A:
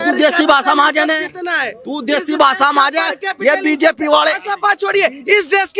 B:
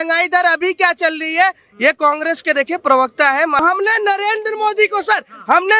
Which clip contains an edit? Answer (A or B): B